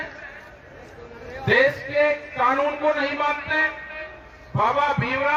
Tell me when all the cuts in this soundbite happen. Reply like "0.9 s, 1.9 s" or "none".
none